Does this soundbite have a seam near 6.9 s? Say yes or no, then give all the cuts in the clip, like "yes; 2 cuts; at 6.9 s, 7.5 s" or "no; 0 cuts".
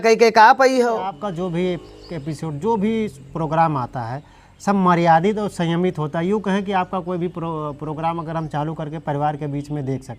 no; 1 cut; at 1.2 s